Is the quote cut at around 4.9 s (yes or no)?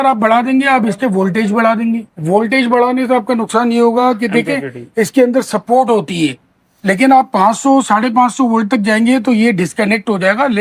no